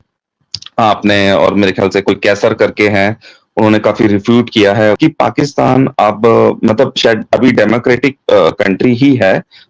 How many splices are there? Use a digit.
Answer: 1